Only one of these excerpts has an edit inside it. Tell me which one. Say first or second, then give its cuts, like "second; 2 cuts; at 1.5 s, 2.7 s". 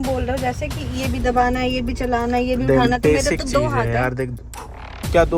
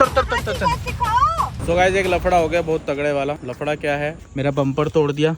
second; 2 cuts; at 1.5 s, 4.2 s